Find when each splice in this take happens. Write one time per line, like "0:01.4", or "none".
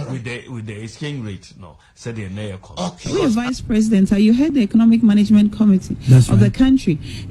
0:03.0